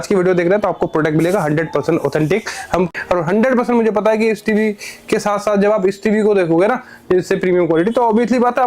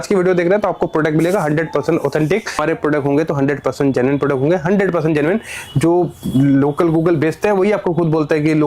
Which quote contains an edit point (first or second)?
first